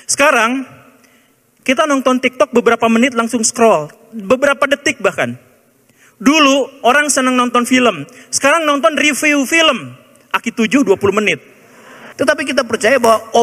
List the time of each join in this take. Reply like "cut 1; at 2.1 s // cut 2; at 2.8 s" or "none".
cut 1; at 12.0 s